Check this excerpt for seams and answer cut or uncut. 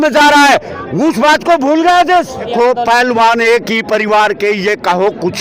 cut